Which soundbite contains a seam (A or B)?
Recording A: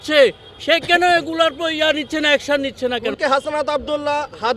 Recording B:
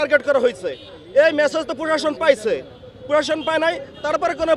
A